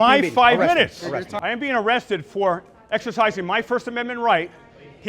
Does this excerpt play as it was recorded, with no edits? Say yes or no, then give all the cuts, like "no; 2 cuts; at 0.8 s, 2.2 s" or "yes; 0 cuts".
no; 1 cut; at 1.3 s